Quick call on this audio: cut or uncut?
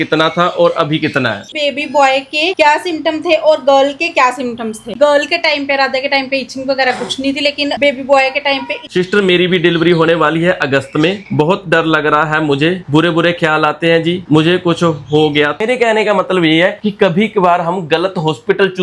cut